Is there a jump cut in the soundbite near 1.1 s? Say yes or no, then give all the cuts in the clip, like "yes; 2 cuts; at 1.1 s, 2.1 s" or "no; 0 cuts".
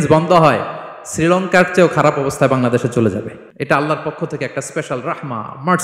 no; 1 cut; at 3.4 s